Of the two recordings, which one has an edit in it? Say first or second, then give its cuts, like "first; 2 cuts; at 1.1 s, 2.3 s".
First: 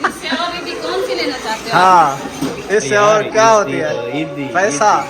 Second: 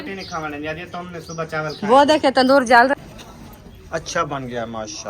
second; 1 cut; at 2.9 s